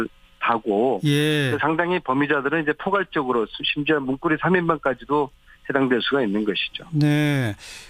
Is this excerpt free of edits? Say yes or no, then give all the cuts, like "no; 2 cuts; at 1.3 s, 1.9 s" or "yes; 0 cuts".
no; 1 cut; at 3.5 s